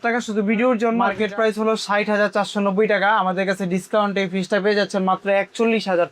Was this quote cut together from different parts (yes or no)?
yes